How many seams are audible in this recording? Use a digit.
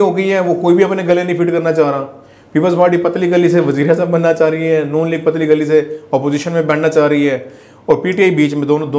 0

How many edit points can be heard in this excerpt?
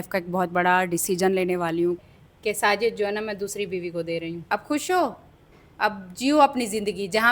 2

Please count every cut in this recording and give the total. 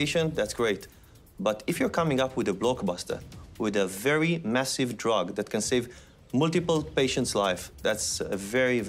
0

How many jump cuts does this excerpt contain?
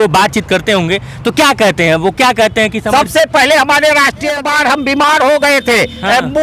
1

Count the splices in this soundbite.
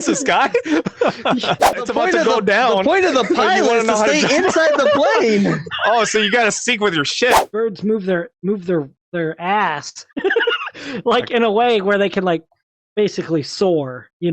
2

